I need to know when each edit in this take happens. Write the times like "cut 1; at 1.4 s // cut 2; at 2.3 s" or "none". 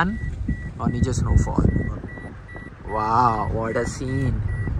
none